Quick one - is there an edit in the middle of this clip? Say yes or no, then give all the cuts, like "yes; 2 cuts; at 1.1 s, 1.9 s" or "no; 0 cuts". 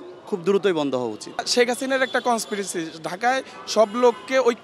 yes; 1 cut; at 1.4 s